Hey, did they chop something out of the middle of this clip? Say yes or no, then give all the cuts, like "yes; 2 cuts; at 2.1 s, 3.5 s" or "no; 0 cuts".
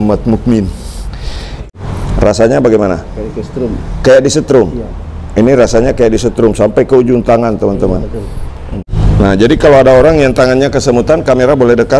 yes; 2 cuts; at 1.5 s, 8.8 s